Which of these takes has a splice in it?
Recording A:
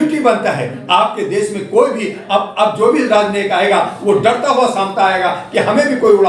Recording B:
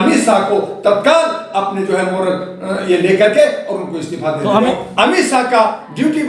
B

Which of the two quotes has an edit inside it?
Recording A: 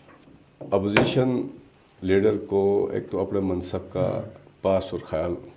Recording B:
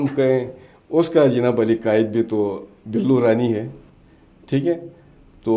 B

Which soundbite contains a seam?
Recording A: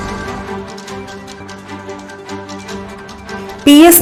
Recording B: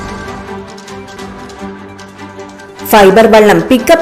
B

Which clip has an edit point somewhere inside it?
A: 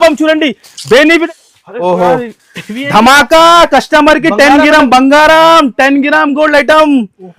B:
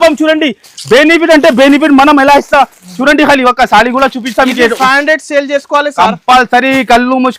A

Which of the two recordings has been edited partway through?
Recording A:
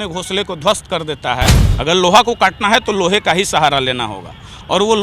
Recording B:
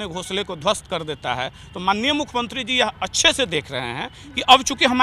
A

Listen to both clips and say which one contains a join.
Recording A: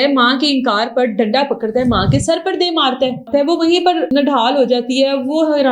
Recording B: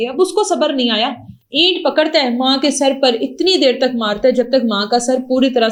A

